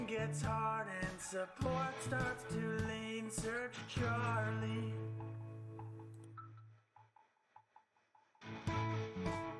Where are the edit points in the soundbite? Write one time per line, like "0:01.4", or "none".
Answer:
none